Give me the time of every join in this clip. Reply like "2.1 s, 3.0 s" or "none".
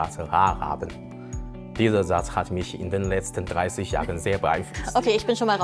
none